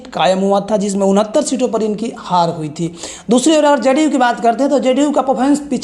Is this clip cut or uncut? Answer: uncut